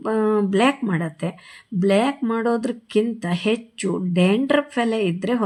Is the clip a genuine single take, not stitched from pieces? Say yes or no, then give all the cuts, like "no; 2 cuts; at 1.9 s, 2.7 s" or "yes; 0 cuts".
yes; 0 cuts